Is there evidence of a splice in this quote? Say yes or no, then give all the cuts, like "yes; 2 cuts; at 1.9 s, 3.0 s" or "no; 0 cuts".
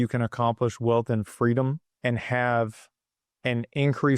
yes; 1 cut; at 1.9 s